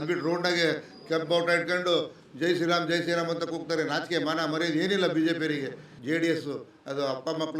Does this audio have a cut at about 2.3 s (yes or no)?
no